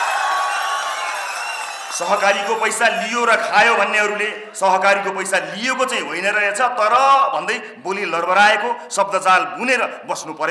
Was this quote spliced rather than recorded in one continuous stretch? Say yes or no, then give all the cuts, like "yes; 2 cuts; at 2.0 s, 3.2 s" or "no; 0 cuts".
no; 0 cuts